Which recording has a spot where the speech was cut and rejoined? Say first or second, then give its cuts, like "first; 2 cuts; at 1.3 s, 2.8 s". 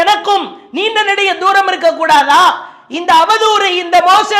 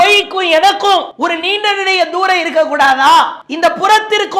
second; 2 cuts; at 1.1 s, 3.4 s